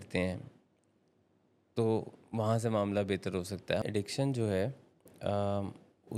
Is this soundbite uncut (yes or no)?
no